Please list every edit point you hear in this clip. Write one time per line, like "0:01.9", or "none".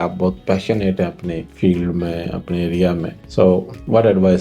0:01.5
0:03.2

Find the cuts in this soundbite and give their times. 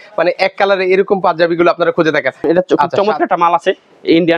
0:02.4

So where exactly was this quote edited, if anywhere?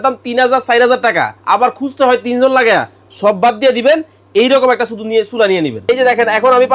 0:05.8

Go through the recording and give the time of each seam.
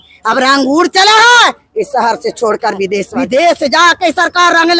0:03.1

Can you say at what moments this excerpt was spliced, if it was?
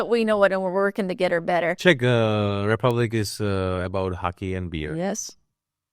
0:01.8

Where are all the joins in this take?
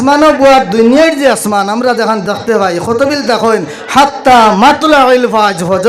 none

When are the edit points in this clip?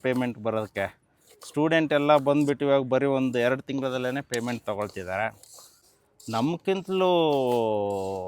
0:05.8

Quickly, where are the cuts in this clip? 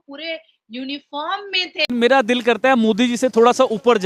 0:01.9

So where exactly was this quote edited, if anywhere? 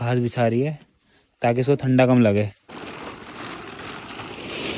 0:02.6

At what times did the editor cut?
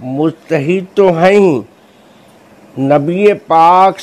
none

